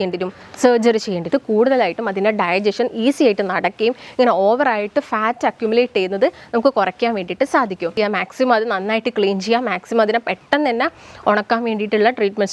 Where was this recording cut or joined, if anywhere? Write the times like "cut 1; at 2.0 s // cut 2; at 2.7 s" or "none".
cut 1; at 1.3 s // cut 2; at 8.0 s